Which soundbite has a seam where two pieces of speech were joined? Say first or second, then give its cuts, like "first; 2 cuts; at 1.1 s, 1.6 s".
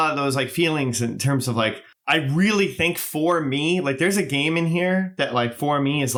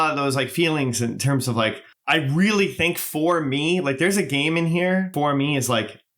second; 1 cut; at 5.1 s